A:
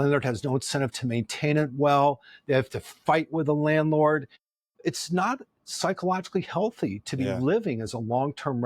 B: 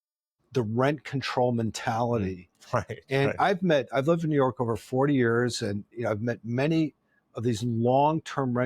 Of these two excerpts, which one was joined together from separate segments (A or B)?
A